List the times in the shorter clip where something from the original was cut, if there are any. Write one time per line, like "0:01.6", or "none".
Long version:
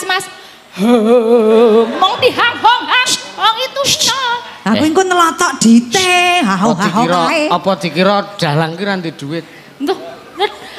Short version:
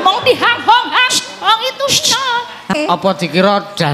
0:02.7